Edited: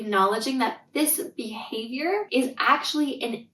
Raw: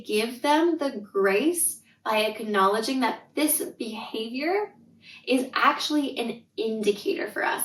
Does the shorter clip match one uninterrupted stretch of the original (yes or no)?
no